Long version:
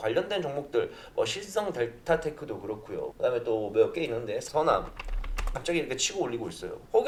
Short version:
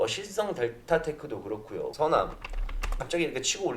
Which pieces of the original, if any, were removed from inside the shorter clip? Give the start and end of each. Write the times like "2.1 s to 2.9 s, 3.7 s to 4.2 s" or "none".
3.1 s to 4.5 s